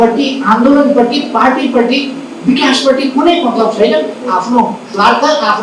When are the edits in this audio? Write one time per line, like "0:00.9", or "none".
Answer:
none